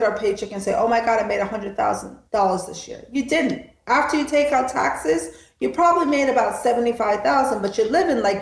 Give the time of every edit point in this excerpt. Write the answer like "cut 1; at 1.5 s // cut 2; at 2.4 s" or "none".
cut 1; at 2.1 s